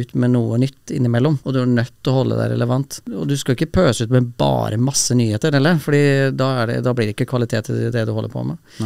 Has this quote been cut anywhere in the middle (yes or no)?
yes